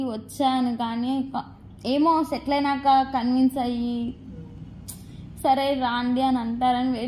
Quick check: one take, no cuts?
yes; 0 cuts

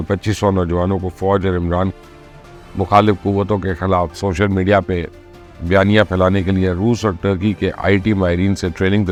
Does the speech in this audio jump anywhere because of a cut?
no; 0 cuts

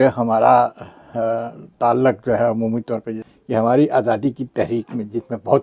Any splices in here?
yes; 1 cut; at 3.3 s

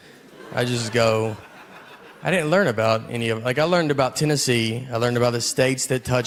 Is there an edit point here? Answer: no; 0 cuts

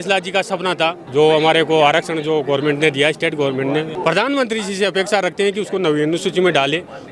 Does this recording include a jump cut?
yes; 2 cuts; at 1.0 s, 3.9 s

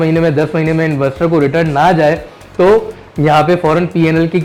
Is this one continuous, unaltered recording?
yes; 0 cuts

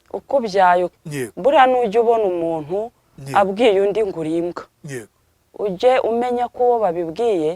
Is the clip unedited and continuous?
no; 1 cut; at 0.9 s

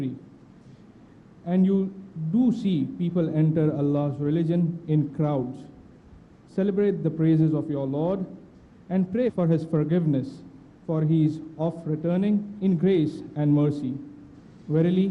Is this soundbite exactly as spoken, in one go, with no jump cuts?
yes; 0 cuts

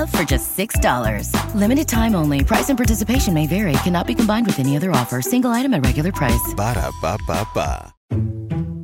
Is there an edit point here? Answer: yes; 1 cut; at 7.9 s

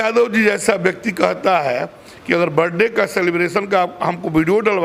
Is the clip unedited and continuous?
yes; 0 cuts

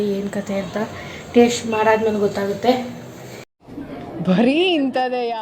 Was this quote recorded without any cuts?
yes; 0 cuts

